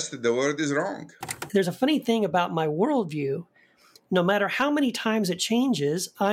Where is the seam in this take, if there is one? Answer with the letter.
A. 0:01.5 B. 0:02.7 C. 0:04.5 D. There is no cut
A